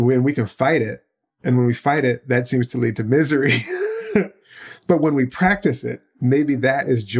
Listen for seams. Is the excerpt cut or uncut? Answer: cut